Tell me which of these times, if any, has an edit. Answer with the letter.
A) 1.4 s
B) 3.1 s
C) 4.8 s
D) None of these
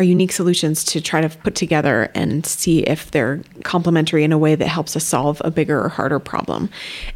A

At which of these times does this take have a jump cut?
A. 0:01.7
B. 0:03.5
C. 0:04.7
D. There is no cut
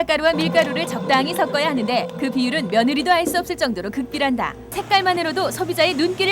C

